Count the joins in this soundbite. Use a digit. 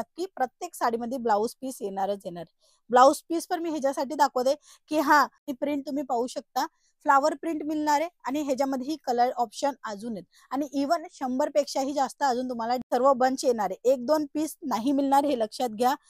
2